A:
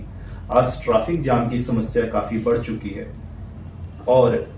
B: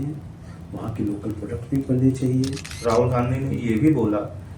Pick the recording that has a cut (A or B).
B